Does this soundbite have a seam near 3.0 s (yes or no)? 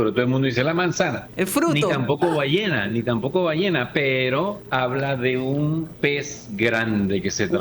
no